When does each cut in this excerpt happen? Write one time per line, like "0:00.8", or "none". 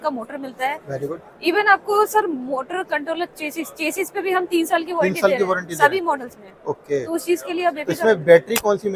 none